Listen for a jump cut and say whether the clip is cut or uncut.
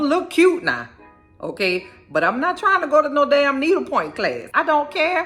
uncut